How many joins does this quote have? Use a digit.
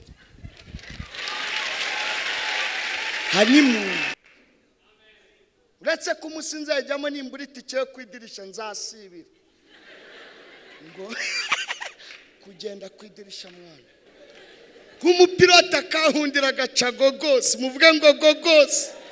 2